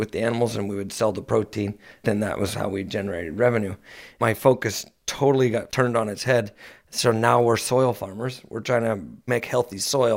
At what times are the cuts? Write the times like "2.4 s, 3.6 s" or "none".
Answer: 2.0 s, 4.1 s, 5.7 s, 9.3 s